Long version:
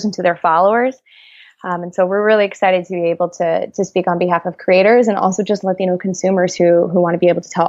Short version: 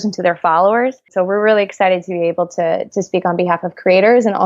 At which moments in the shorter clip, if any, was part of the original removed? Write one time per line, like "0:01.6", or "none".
0:01.0